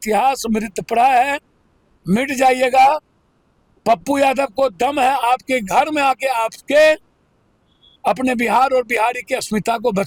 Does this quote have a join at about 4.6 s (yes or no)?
no